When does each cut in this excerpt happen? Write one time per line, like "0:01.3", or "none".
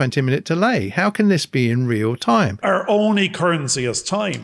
0:02.6